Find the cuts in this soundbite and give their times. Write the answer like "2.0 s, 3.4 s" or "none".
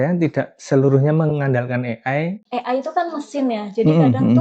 2.4 s